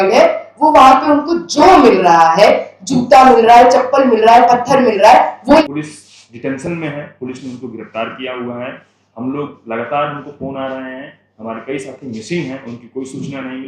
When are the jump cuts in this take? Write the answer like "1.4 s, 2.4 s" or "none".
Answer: 5.6 s